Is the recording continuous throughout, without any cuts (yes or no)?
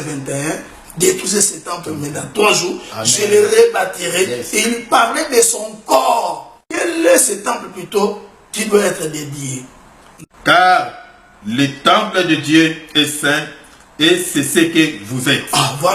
no